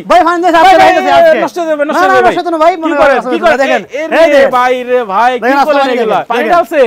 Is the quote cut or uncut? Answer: uncut